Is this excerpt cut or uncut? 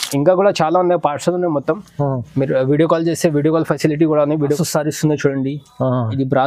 cut